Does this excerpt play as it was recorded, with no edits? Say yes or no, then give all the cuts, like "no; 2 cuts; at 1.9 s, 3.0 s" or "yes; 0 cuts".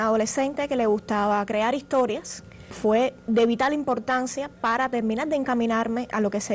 no; 1 cut; at 2.7 s